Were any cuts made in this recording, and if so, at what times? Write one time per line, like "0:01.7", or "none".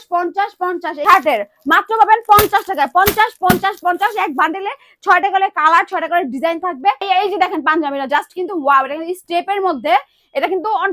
0:01.0
0:07.1